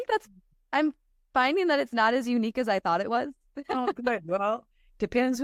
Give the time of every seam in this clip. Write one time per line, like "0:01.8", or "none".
none